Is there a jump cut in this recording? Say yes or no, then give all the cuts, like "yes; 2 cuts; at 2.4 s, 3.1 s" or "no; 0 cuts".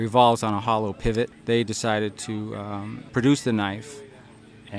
yes; 2 cuts; at 1.4 s, 3.0 s